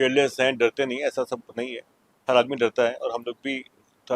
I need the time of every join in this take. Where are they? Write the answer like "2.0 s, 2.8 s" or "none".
none